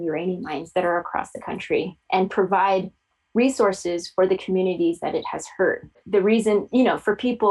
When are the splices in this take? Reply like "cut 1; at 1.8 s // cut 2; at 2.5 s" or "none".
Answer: cut 1; at 6.0 s